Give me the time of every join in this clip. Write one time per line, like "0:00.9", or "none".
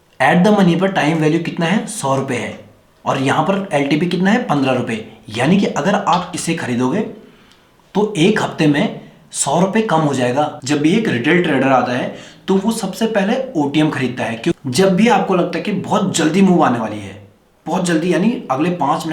0:10.6
0:14.6